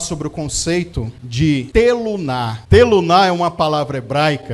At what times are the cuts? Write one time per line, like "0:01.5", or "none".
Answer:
0:01.4
0:02.6